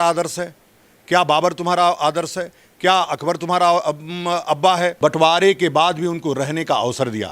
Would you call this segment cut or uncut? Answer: cut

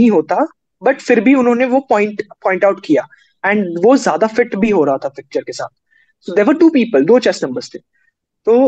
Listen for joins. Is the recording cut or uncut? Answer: uncut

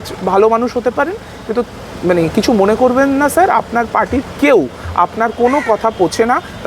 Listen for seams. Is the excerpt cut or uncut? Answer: uncut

